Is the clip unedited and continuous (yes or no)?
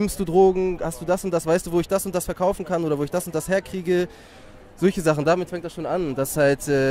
yes